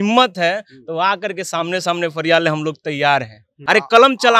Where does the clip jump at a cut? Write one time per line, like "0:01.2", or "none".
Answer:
0:03.5